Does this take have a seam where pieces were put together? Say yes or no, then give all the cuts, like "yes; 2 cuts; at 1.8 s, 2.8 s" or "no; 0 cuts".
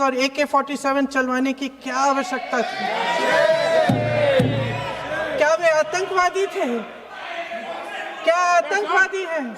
no; 0 cuts